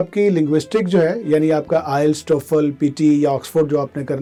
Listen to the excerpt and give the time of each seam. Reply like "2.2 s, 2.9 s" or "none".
none